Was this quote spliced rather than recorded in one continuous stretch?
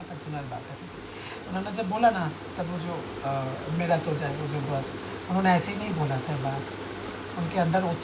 no; 0 cuts

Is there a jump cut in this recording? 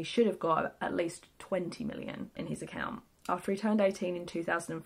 no; 0 cuts

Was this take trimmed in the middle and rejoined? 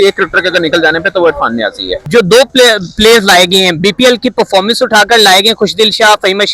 yes; 1 cut; at 2.0 s

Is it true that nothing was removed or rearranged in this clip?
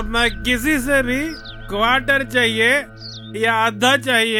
yes; 0 cuts

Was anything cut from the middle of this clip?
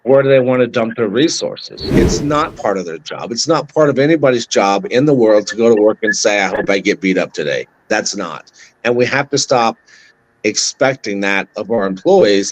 yes; 1 cut; at 2.1 s

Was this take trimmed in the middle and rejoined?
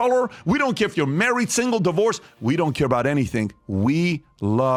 no; 0 cuts

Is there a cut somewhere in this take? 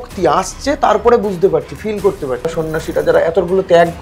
yes; 1 cut; at 2.5 s

